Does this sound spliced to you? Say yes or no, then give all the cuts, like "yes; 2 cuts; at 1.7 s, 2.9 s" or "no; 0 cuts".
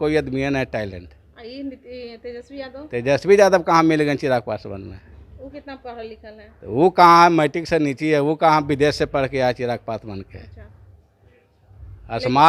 no; 0 cuts